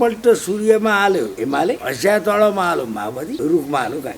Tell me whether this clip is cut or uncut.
cut